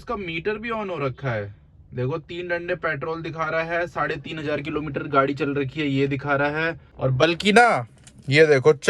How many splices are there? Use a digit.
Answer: 1